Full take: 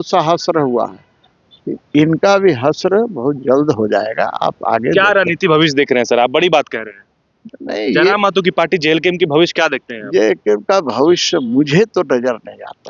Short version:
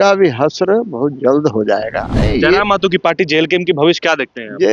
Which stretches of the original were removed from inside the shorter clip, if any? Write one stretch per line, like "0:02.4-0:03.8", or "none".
0:04.3-0:07.5